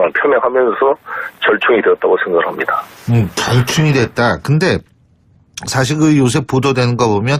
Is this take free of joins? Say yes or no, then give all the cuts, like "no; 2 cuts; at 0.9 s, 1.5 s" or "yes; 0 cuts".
no; 1 cut; at 0.9 s